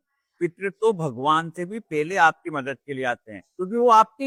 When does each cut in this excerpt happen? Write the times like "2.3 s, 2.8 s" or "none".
none